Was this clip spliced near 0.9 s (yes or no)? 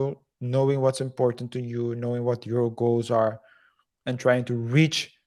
no